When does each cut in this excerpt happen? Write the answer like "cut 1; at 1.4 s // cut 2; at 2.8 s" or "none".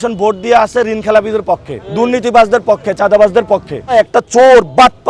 cut 1; at 1.8 s // cut 2; at 3.9 s